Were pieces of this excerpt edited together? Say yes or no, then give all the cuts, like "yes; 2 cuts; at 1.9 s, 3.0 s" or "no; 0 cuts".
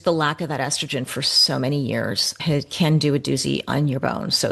no; 0 cuts